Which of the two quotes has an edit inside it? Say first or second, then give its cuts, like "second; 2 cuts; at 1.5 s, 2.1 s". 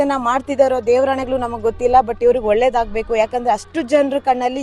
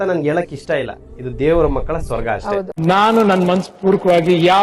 second; 1 cut; at 2.7 s